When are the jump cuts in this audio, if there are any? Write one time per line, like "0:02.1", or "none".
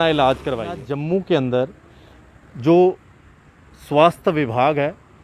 0:00.9